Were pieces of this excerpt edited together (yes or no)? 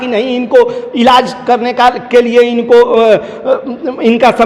no